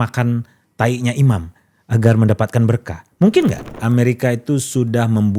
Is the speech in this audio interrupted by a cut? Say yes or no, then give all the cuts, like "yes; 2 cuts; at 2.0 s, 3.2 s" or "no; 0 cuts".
yes; 1 cut; at 3.7 s